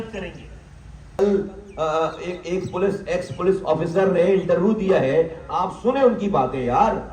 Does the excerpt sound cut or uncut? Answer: cut